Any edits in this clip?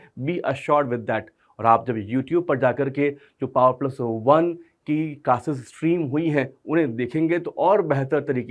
no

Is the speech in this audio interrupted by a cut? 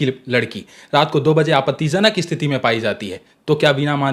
no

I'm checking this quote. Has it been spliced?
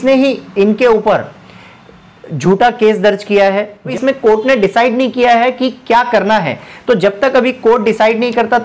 yes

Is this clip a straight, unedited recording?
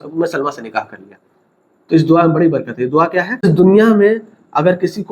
no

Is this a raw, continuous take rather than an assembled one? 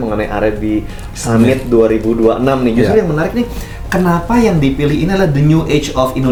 yes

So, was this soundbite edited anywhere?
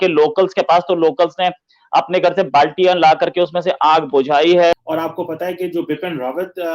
yes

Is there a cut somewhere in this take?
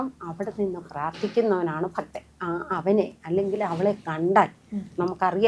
yes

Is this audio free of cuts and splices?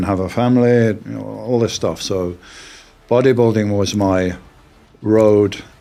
yes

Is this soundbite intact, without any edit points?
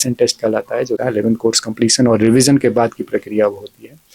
no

